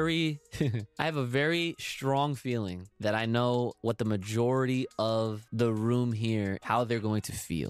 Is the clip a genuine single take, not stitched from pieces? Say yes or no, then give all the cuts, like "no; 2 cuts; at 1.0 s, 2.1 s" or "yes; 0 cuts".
no; 5 cuts; at 0.8 s, 2.8 s, 3.8 s, 5.4 s, 6.6 s